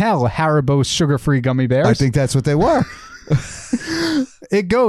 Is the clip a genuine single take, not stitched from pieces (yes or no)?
yes